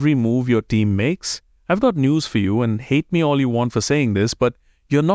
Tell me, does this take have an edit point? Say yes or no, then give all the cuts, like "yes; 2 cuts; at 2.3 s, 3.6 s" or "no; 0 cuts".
no; 0 cuts